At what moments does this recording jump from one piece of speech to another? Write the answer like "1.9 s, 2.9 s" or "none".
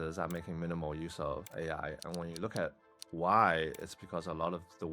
1.5 s